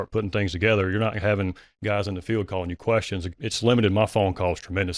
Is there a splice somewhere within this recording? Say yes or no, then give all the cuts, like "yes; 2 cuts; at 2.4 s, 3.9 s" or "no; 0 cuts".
yes; 1 cut; at 1.7 s